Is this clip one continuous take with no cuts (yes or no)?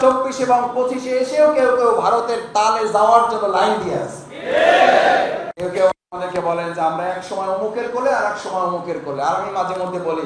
no